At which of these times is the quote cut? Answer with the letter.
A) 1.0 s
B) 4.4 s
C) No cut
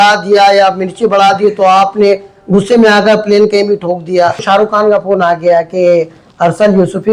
B